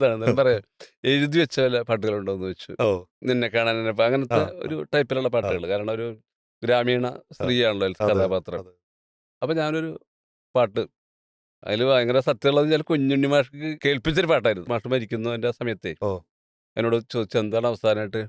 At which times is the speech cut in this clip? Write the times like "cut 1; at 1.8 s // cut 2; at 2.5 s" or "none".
none